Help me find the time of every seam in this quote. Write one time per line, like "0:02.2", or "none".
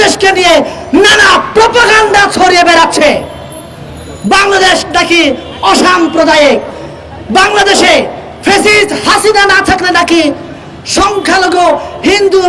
none